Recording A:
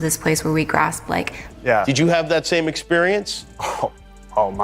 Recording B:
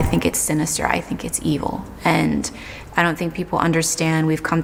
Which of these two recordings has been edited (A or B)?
A